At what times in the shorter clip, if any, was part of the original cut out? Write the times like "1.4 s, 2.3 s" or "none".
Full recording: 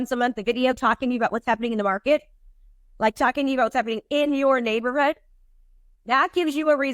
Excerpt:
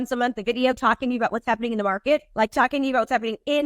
2.3 s